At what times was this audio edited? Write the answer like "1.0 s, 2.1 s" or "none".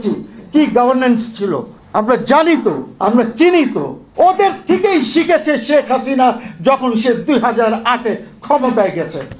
1.7 s, 2.9 s, 4.0 s